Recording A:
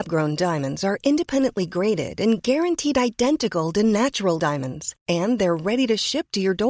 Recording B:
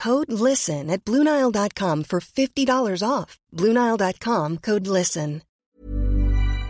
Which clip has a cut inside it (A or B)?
B